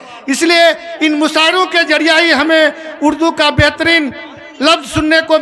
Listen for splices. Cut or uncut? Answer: uncut